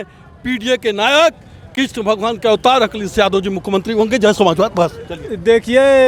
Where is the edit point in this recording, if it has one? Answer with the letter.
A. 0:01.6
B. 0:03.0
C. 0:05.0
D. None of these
D